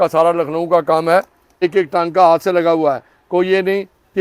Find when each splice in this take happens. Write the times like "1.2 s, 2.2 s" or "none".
1.6 s

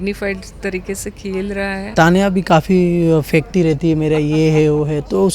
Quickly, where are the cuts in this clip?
1.9 s

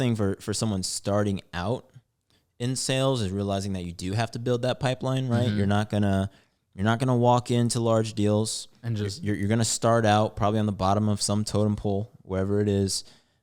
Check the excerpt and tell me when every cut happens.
none

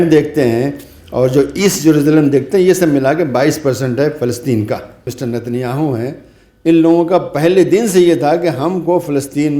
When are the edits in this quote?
5.1 s

